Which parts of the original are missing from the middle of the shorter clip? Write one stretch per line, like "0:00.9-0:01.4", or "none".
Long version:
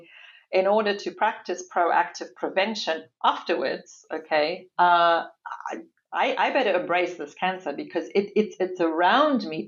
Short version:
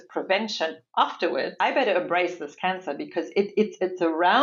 0:03.8-0:06.4